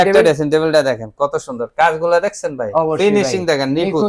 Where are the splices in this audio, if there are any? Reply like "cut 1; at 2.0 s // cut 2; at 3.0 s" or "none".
none